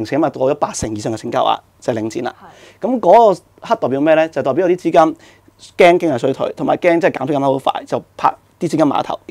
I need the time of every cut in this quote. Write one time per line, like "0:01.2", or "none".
none